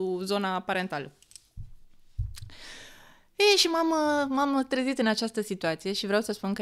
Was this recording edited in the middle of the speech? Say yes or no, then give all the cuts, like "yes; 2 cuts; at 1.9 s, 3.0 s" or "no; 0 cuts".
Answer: no; 0 cuts